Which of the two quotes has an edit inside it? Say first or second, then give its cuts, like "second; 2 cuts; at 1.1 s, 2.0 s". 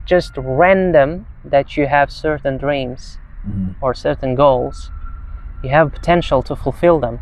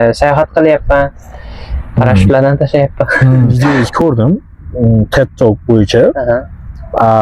second; 1 cut; at 3.5 s